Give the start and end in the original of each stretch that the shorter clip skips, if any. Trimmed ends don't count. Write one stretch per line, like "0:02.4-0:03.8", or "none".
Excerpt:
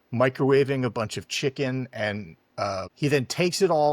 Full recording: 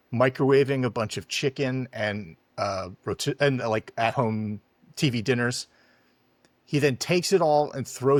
0:02.9-0:06.6

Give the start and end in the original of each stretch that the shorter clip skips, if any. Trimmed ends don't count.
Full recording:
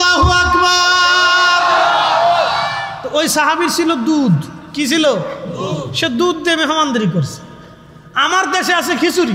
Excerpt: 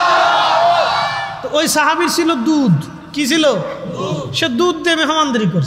none

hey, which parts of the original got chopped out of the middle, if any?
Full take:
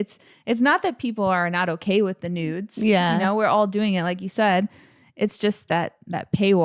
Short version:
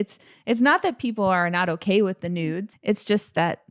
0:02.7-0:05.0

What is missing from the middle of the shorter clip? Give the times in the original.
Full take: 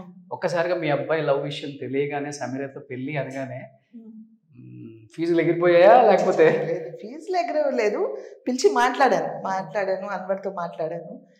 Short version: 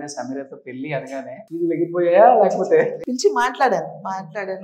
0:03.7-0:05.1
0:06.7-0:08.4

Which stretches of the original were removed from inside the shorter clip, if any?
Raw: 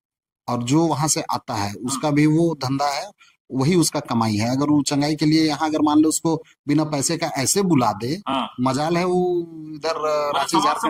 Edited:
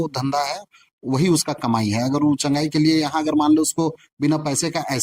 none

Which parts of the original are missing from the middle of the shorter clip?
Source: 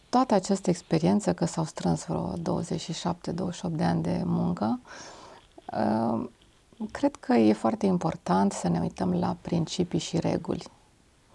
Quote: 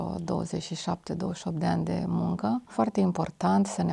0:04.9-0:07.6

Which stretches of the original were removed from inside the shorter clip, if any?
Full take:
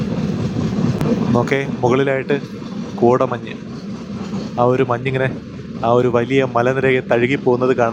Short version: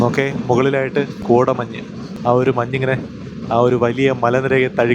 0:02.5-0:02.9
0:03.8-0:04.4

